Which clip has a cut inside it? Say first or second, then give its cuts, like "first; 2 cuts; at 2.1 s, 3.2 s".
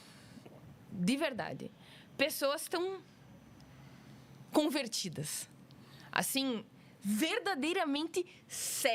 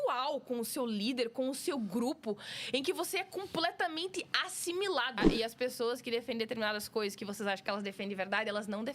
second; 1 cut; at 5.3 s